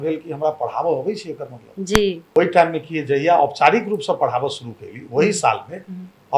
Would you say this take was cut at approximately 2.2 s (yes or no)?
yes